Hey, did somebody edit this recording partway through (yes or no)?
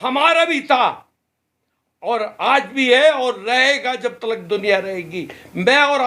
no